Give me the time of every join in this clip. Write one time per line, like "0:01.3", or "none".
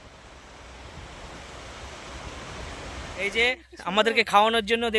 0:02.8